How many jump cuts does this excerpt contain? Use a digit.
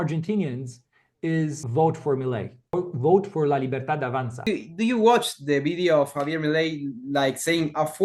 3